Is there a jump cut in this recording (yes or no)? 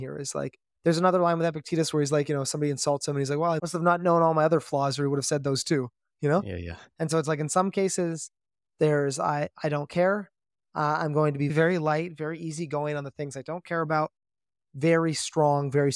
yes